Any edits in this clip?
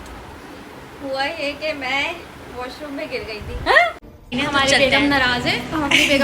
yes; 1 cut; at 4.3 s

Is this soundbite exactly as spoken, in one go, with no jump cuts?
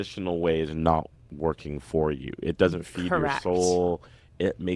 yes; 0 cuts

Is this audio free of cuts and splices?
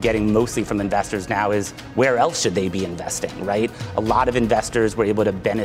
yes; 0 cuts

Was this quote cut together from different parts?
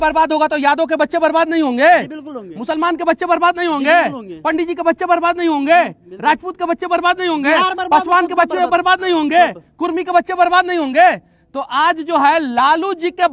no; 0 cuts

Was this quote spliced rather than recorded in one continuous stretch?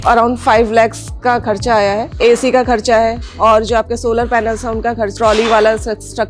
yes; 2 cuts; at 2.2 s, 5.1 s

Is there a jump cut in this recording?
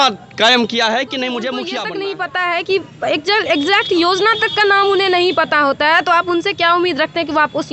yes; 1 cut; at 1.8 s

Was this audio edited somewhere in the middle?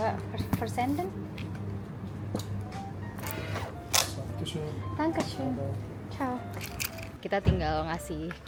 no; 0 cuts

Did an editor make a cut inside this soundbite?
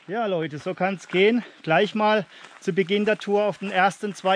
no; 0 cuts

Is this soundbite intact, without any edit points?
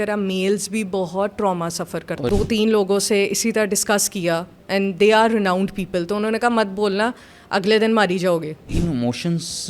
no; 2 cuts; at 2.2 s, 8.7 s

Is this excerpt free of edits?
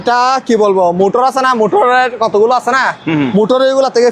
yes; 0 cuts

